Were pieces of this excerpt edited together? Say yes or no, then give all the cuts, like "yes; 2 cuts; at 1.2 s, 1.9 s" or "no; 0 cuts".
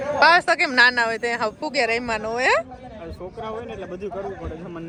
no; 0 cuts